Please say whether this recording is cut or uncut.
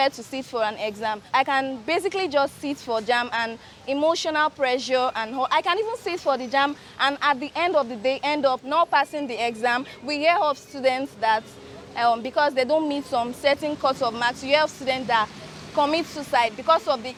uncut